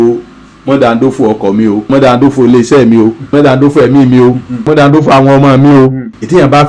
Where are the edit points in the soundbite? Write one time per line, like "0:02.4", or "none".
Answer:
0:01.9
0:03.3
0:04.7